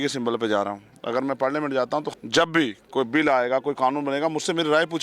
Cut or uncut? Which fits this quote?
cut